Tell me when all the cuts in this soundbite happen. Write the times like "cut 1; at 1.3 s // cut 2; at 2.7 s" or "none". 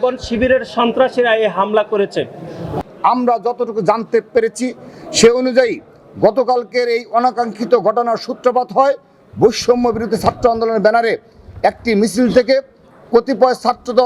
cut 1; at 2.7 s

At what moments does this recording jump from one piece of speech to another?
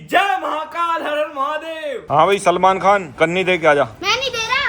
cut 1; at 2.0 s

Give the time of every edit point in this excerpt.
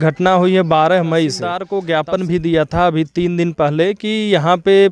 cut 1; at 1.7 s

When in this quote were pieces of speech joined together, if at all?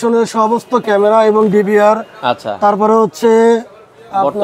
none

